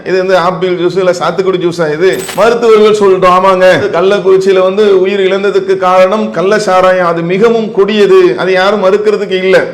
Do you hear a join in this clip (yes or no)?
yes